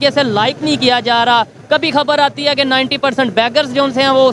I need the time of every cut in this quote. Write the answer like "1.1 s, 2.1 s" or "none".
none